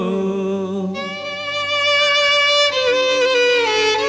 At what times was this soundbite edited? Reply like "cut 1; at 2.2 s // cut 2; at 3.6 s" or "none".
none